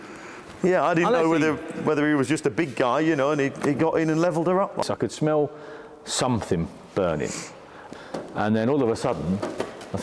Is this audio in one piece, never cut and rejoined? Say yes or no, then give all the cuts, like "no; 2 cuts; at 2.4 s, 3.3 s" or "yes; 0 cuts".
no; 2 cuts; at 4.8 s, 7.8 s